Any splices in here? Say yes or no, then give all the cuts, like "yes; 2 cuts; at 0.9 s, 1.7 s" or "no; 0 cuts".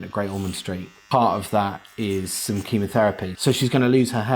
yes; 2 cuts; at 0.9 s, 3.3 s